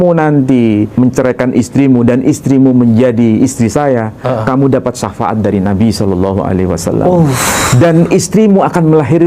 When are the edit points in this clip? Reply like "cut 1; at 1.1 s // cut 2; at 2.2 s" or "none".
cut 1; at 0.9 s